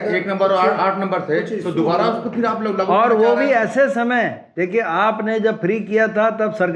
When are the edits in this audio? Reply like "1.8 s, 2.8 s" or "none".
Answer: none